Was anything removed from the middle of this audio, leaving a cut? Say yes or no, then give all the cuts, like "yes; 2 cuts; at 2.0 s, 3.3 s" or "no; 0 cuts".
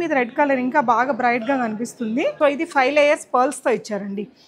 yes; 1 cut; at 2.3 s